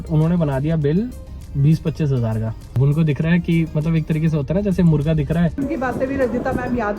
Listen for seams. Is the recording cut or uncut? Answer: cut